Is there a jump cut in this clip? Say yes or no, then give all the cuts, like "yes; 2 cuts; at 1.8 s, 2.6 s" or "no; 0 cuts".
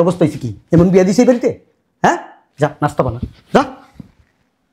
no; 0 cuts